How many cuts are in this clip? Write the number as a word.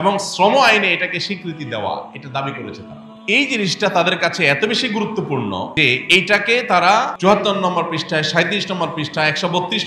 three